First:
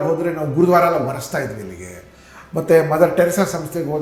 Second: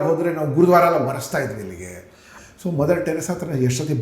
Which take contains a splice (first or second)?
second